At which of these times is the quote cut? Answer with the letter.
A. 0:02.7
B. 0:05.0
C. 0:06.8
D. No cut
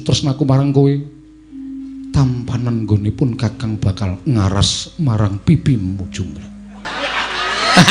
C